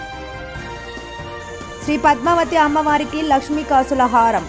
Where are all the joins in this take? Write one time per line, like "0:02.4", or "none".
0:01.8

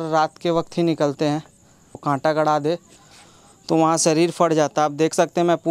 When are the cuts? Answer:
0:02.0

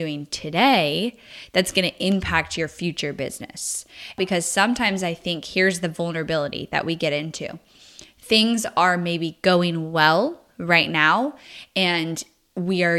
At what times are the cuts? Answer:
0:04.2

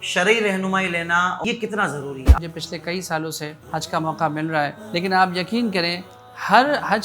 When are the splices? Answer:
0:01.4
0:02.4
0:03.6
0:04.8

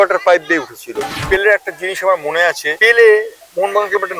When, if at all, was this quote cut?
0:01.2
0:02.7

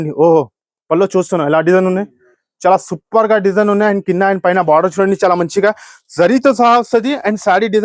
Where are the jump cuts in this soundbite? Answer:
none

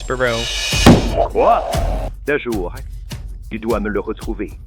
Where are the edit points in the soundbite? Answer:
0:02.1

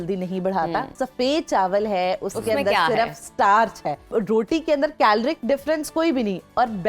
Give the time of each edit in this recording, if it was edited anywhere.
0:00.9
0:04.1

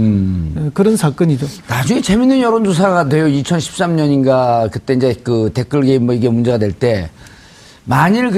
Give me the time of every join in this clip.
0:04.6

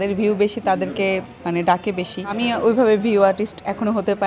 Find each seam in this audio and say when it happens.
0:02.3

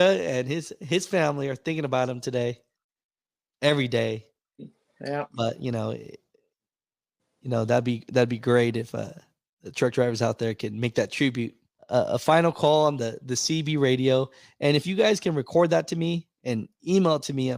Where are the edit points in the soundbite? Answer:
0:11.9

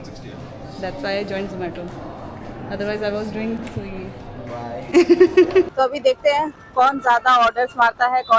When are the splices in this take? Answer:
0:05.3

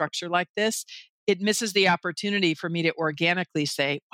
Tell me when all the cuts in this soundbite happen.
0:01.1

